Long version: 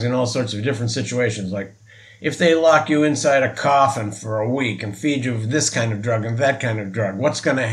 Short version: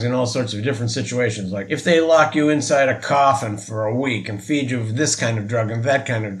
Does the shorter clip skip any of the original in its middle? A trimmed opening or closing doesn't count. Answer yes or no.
yes